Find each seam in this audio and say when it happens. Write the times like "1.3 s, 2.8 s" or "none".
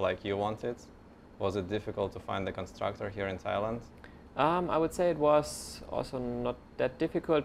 none